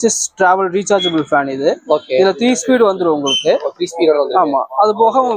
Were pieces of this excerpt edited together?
no; 0 cuts

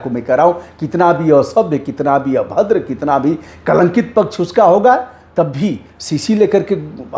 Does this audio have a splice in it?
no; 0 cuts

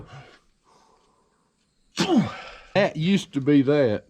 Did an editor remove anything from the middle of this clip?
yes; 1 cut; at 2.8 s

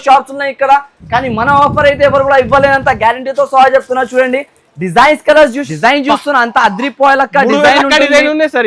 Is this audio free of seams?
no; 1 cut; at 5.6 s

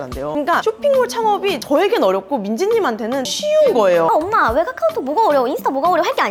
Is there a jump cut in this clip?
no; 0 cuts

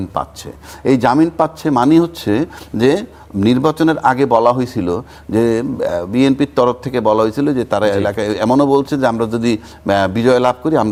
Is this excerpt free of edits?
yes; 0 cuts

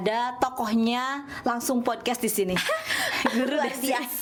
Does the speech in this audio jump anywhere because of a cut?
no; 0 cuts

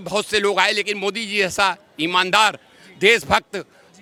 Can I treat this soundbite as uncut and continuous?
yes; 0 cuts

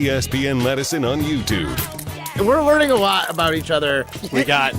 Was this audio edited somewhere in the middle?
yes; 1 cut; at 2.2 s

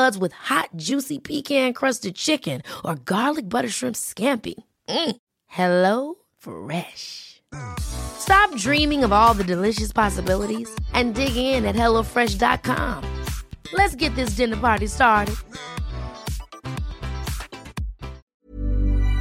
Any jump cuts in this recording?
yes; 1 cut; at 18.2 s

